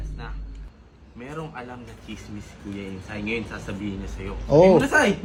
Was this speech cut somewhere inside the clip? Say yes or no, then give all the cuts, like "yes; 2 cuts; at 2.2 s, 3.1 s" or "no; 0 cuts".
no; 0 cuts